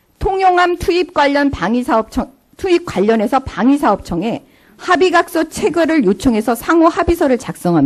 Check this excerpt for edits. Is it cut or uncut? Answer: cut